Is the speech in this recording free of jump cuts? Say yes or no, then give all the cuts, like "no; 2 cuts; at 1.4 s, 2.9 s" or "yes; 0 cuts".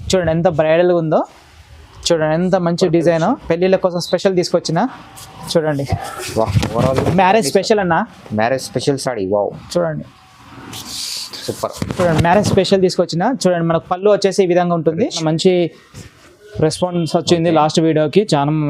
no; 1 cut; at 15.2 s